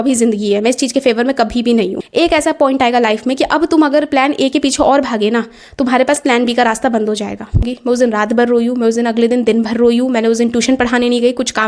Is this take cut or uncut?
cut